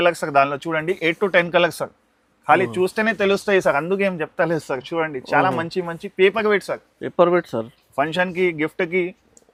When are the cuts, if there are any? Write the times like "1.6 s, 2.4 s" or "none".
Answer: none

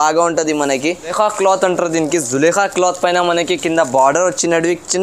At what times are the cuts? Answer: 1.1 s

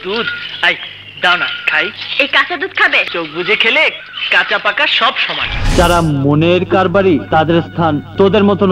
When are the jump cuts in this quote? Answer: 5.7 s

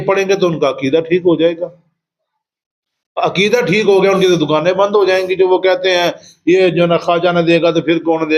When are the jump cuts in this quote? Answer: none

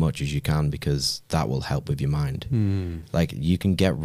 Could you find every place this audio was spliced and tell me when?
none

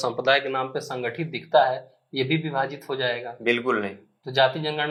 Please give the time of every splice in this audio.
none

